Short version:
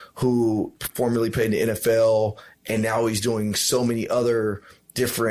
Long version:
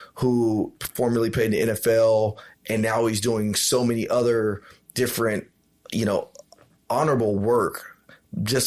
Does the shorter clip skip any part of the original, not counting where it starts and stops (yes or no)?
no